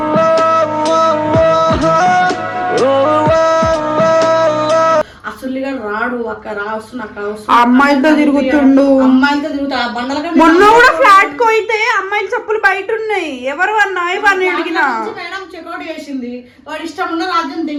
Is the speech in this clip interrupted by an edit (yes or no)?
no